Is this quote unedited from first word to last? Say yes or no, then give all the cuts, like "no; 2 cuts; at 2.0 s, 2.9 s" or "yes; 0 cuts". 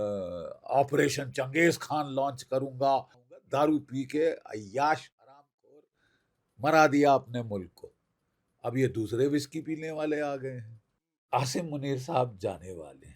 no; 2 cuts; at 3.5 s, 11.2 s